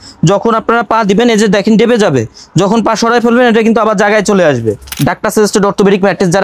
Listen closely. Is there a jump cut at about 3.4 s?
no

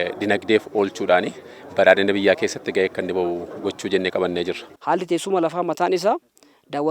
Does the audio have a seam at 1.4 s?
no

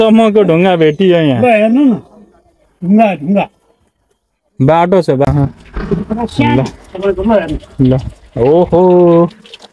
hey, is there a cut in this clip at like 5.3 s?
yes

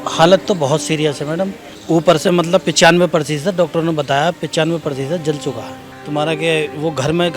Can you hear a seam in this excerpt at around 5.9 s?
yes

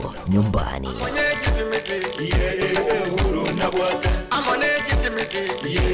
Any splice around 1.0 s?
yes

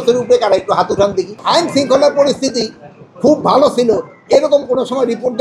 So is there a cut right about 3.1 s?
no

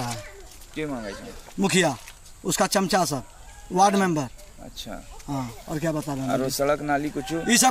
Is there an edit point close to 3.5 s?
no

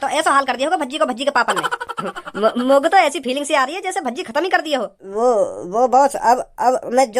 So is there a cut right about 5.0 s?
yes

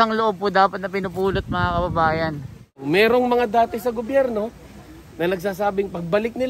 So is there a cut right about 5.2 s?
no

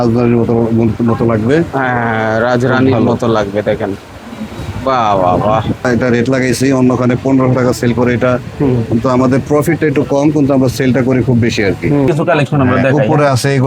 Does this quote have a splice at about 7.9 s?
no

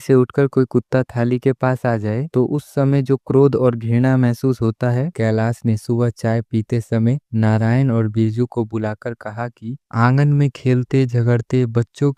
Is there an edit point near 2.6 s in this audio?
no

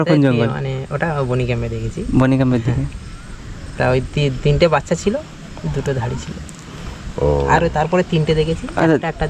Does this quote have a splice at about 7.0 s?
no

